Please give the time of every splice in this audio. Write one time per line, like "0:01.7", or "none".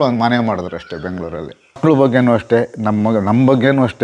0:01.8